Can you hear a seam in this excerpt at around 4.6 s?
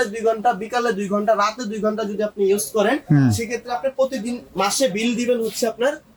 no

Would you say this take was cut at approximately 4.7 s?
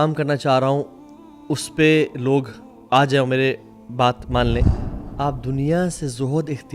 yes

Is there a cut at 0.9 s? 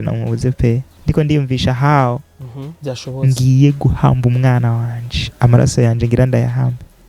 yes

